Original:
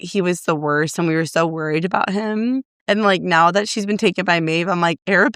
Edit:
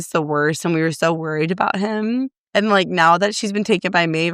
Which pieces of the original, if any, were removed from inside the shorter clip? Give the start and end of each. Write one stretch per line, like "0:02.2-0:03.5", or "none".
none